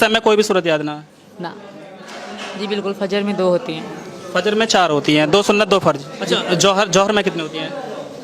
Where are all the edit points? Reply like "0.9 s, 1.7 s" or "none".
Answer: 1.7 s, 6.1 s

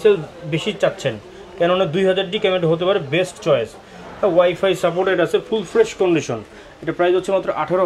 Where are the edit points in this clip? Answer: none

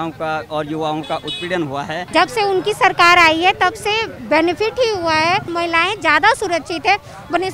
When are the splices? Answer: 2.0 s, 5.5 s

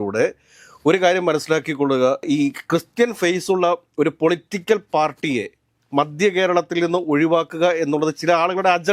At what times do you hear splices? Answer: none

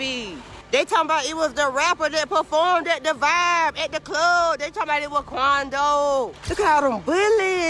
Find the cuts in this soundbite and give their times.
6.4 s

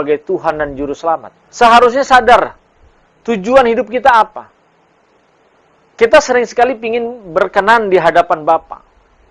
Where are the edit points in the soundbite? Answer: 1.4 s

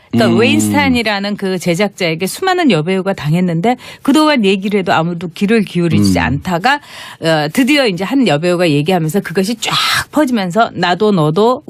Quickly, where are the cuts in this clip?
10.8 s

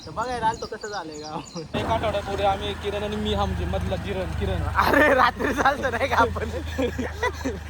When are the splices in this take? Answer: 1.7 s

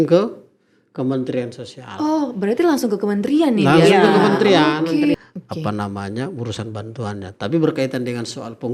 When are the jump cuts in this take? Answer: 5.1 s

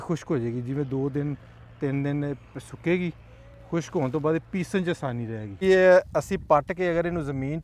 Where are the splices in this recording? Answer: 5.6 s

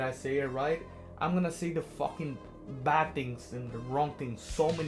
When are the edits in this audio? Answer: none

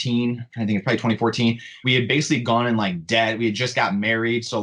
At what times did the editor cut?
1.7 s

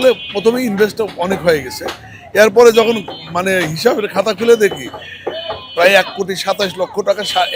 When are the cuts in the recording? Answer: none

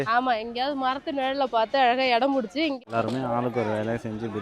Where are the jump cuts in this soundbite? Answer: 2.8 s

